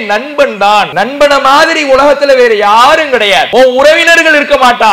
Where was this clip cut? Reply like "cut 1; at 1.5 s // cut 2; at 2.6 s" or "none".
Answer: cut 1; at 0.9 s // cut 2; at 3.5 s